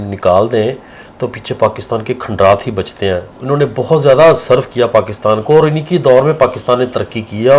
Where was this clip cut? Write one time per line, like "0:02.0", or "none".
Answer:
0:03.3